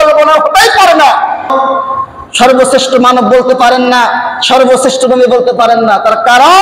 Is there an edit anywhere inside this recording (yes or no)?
yes